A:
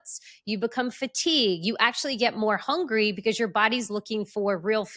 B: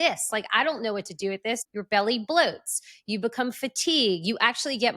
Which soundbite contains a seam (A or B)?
B